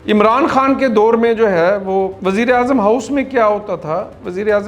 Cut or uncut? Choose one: cut